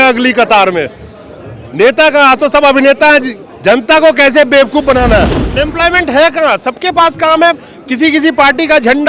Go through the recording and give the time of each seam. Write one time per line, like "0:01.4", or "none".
0:05.5